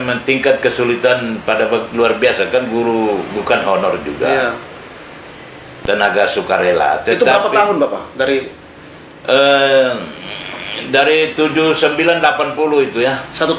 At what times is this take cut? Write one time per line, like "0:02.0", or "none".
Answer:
none